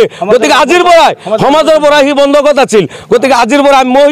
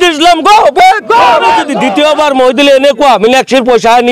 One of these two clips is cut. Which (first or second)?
second